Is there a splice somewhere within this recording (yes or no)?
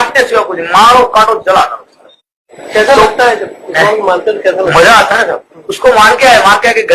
no